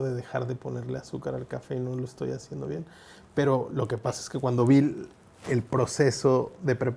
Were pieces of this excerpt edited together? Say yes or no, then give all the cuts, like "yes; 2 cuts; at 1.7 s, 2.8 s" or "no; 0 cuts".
no; 0 cuts